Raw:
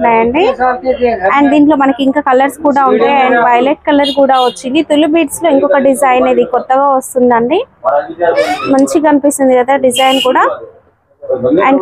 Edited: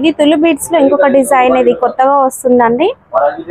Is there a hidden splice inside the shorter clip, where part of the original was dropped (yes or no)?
no